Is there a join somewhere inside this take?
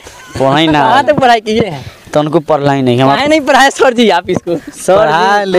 no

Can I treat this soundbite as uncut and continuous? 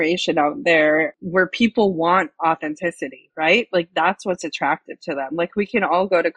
no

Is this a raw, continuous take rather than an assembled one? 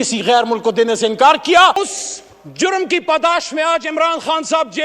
no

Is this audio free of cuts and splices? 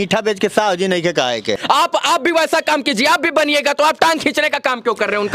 no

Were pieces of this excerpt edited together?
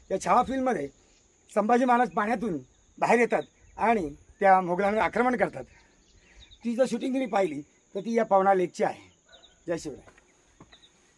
no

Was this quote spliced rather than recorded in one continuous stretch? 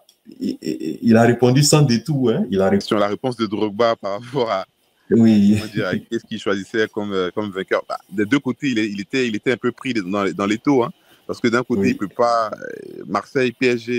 yes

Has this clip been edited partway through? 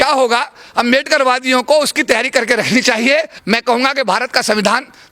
yes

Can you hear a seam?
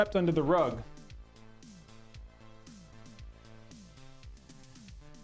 no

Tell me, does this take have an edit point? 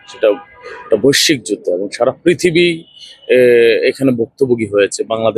no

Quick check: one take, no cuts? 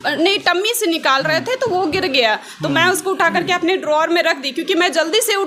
yes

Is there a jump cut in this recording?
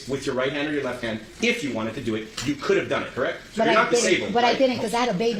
no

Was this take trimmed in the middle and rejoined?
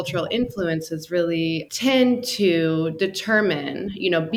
yes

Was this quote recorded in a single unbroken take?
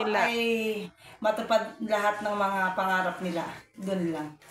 yes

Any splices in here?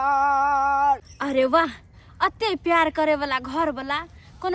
yes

